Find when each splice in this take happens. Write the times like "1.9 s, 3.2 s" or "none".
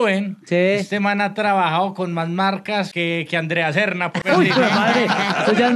2.9 s, 4.2 s